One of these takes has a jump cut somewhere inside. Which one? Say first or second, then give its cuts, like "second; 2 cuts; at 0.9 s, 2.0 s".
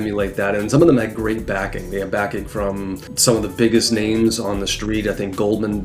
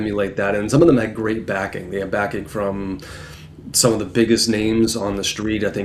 first; 1 cut; at 3.1 s